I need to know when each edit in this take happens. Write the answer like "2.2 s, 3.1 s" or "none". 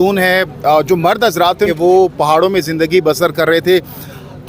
1.7 s

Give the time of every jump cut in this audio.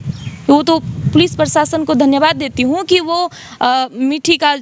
none

